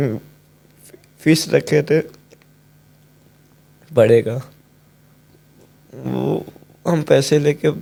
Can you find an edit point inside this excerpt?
no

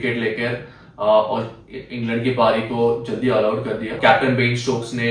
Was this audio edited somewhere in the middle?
yes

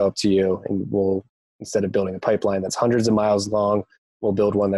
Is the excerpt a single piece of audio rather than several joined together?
yes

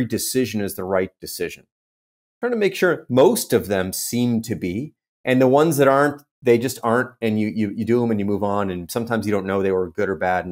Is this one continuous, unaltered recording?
yes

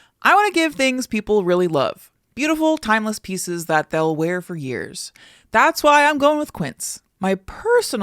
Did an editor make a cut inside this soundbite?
yes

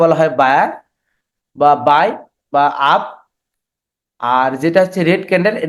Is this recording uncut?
yes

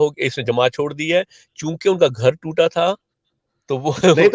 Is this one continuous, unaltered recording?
yes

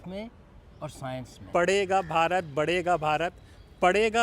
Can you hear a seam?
yes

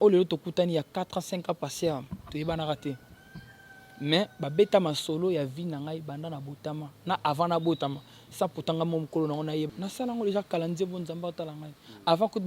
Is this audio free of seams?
no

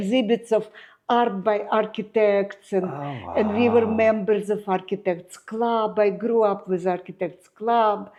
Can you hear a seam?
no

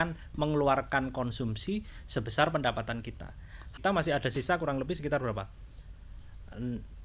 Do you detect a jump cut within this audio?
yes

